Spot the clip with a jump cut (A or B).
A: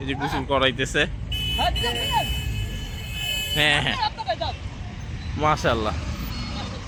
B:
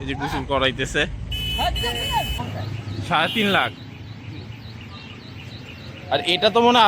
B